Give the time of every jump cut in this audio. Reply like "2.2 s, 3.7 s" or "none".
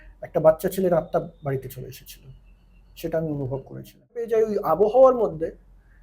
4.3 s